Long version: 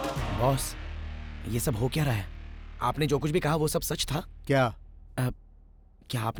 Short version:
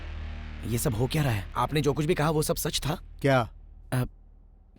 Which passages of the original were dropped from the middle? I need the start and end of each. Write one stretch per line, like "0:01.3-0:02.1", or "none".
0:02.3-0:02.7